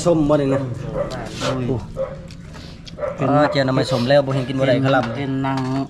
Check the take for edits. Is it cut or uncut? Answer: uncut